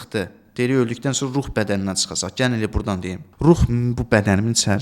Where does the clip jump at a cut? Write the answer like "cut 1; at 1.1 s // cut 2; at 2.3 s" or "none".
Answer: cut 1; at 3.2 s